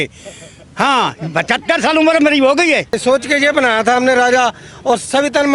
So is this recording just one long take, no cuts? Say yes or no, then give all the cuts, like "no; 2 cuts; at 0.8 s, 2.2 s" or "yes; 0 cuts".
no; 1 cut; at 3.0 s